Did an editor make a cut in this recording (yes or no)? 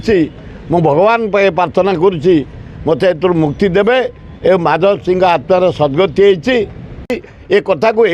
yes